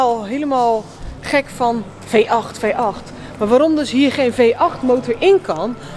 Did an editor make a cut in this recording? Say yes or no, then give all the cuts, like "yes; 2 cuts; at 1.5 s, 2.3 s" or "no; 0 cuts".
no; 0 cuts